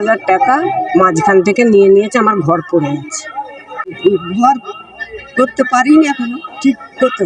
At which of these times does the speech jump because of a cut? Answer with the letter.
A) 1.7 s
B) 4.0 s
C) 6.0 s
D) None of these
B